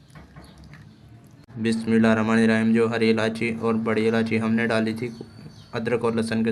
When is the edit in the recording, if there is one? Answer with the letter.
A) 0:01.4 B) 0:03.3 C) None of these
C